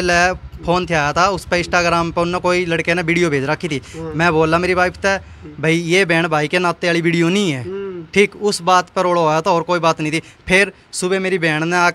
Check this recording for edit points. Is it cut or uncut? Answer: uncut